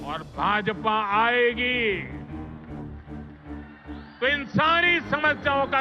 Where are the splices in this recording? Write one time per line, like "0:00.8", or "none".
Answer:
0:02.1
0:04.2